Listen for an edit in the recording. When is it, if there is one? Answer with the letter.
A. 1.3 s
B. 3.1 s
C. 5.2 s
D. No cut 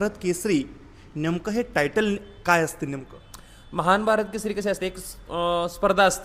D